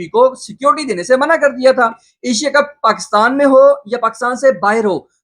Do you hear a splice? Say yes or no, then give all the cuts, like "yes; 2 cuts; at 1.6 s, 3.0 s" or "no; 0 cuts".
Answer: yes; 1 cut; at 2.1 s